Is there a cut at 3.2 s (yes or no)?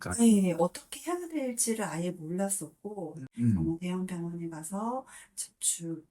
yes